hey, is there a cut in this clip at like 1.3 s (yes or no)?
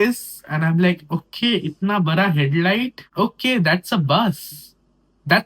no